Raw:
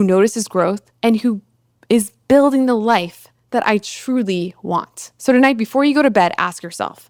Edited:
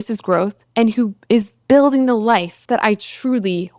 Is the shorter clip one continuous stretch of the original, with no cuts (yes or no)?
no